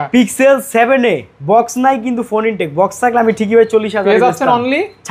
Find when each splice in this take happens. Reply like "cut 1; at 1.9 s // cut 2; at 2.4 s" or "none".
none